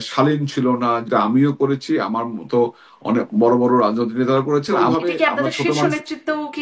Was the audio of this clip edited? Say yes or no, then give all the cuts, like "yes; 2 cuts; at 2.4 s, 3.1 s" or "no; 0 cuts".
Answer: yes; 2 cuts; at 1.0 s, 4.8 s